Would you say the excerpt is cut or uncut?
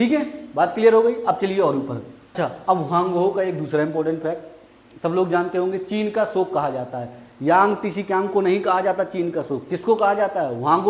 cut